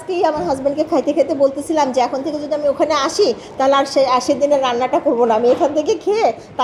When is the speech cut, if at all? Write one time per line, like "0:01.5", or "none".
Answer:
none